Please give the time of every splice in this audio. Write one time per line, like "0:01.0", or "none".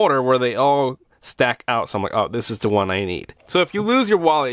0:03.4